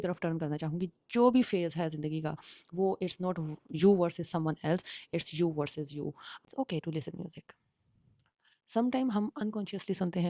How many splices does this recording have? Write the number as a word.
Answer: one